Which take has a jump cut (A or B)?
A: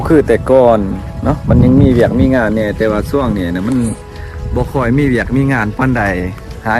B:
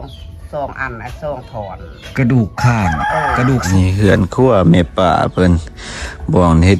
B